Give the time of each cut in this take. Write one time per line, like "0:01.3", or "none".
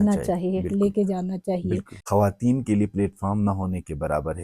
0:01.9